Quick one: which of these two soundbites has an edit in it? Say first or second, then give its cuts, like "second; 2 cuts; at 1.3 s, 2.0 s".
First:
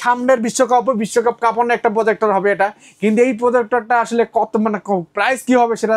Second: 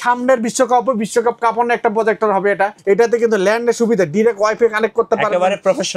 second; 1 cut; at 2.8 s